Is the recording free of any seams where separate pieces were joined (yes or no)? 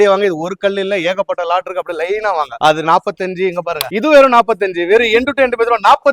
yes